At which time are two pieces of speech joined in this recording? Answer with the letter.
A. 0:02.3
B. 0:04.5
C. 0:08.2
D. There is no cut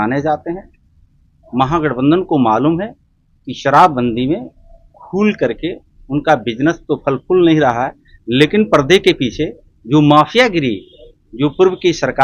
D